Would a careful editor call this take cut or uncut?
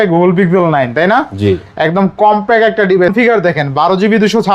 cut